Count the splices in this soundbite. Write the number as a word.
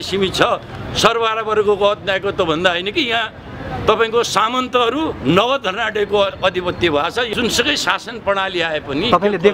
one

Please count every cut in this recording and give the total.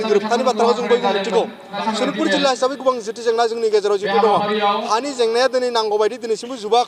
one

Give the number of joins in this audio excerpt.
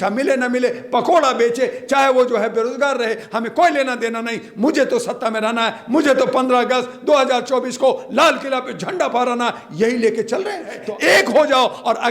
one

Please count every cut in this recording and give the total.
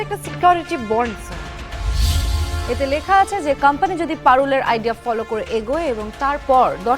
one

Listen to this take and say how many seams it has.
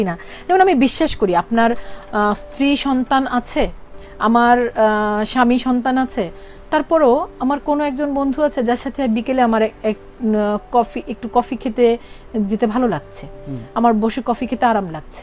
zero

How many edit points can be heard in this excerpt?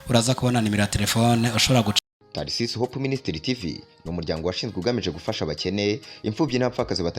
one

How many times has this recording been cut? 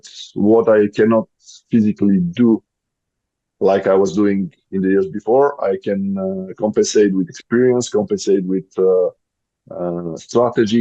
zero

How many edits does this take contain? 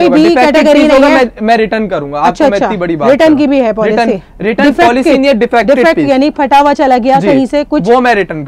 zero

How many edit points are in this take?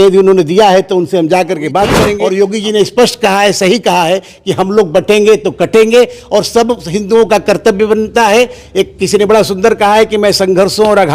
one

